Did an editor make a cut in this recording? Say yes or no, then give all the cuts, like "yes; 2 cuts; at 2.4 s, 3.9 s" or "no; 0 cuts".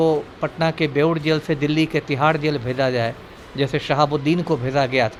no; 0 cuts